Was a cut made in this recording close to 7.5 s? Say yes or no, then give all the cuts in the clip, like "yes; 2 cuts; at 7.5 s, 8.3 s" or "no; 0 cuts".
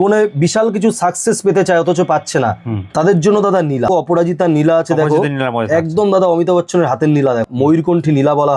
yes; 2 cuts; at 3.9 s, 7.5 s